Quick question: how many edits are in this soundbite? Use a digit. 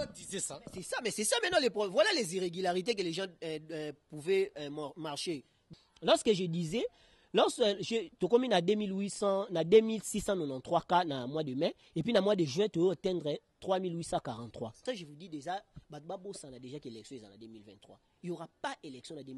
2